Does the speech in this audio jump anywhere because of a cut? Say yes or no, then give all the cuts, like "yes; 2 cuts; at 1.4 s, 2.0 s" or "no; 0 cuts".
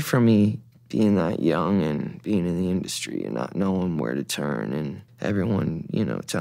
no; 0 cuts